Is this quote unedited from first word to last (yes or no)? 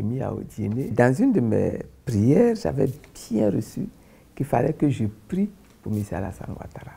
no